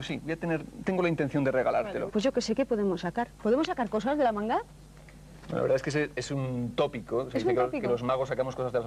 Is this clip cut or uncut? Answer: uncut